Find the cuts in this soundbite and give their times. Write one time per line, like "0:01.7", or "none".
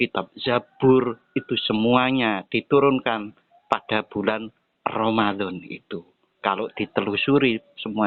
none